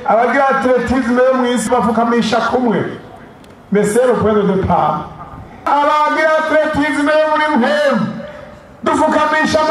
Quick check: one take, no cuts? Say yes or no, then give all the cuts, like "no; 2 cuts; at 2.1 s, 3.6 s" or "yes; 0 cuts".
no; 2 cuts; at 1.7 s, 5.7 s